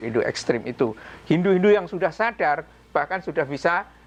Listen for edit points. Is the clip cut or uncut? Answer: uncut